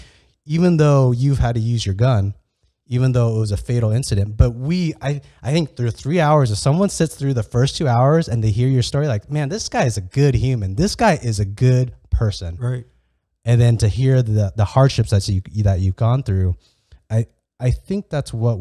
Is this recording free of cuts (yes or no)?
yes